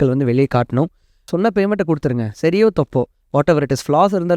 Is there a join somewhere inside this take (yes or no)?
yes